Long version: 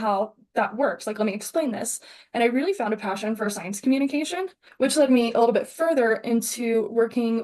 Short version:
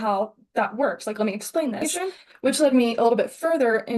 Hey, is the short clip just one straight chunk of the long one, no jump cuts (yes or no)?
no